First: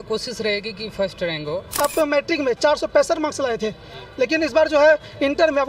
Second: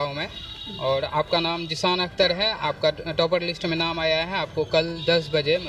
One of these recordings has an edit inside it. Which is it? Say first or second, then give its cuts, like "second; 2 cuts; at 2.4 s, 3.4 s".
first; 1 cut; at 1.8 s